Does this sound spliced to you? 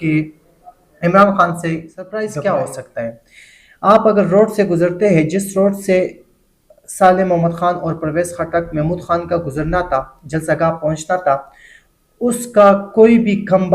yes; 1 cut; at 2.0 s

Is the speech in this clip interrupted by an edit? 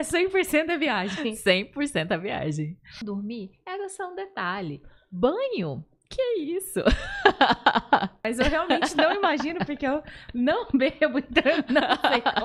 yes; 2 cuts; at 3.0 s, 8.2 s

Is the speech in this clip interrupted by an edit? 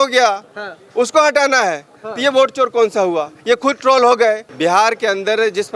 yes; 1 cut; at 4.5 s

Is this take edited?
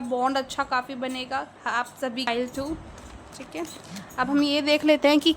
yes; 1 cut; at 2.3 s

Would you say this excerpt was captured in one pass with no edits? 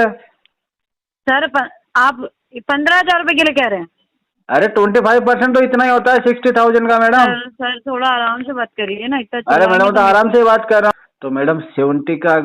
no; 1 cut; at 10.9 s

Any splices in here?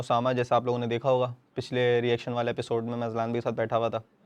no; 0 cuts

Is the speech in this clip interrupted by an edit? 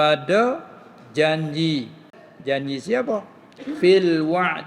yes; 1 cut; at 2.2 s

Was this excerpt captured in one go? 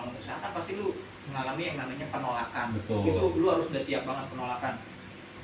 yes; 0 cuts

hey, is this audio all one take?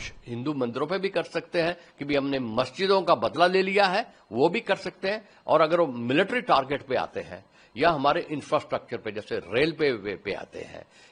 yes; 0 cuts

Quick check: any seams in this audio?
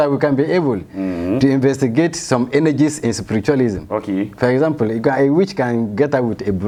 no; 0 cuts

